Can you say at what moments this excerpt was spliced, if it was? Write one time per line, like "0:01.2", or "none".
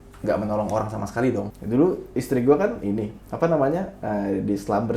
0:01.6